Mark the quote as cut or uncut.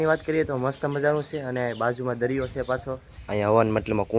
cut